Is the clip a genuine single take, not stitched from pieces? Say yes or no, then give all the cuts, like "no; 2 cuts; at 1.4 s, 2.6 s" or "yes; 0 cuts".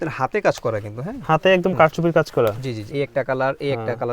no; 1 cut; at 2.8 s